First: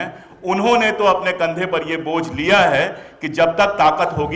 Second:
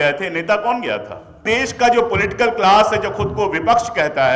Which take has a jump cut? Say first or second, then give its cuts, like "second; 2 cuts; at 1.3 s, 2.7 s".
second; 1 cut; at 1.4 s